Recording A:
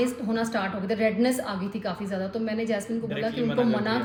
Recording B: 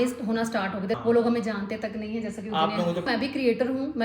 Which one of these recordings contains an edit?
B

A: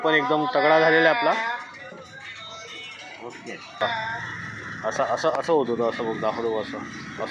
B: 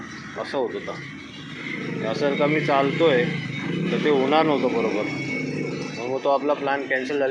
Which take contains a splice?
A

